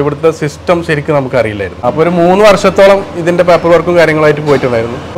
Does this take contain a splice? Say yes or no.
yes